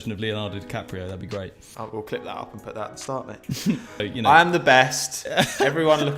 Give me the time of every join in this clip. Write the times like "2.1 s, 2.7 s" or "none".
1.7 s, 4.0 s